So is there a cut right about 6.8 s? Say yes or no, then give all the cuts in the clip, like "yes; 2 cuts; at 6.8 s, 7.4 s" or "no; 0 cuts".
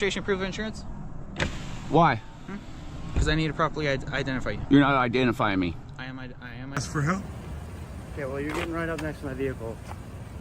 yes; 1 cut; at 6.8 s